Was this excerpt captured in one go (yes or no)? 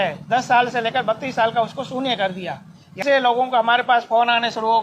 no